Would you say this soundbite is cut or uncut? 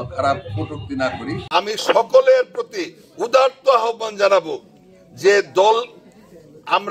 cut